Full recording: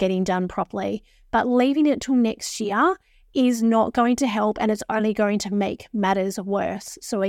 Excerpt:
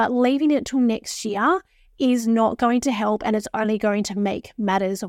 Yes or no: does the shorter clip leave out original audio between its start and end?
no